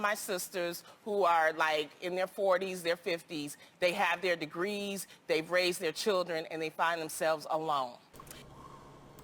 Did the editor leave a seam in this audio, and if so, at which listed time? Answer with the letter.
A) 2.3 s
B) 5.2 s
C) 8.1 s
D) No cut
C